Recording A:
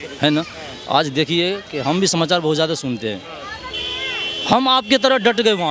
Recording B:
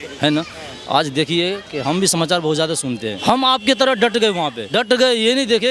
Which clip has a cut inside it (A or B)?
B